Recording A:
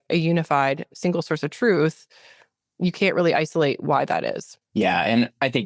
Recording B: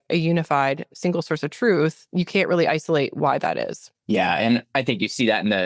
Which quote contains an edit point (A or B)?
B